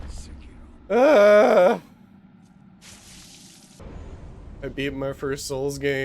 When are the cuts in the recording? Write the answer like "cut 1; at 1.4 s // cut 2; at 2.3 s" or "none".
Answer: cut 1; at 3.8 s